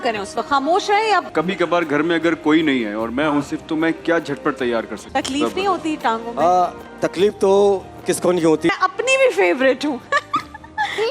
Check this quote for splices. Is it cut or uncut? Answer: cut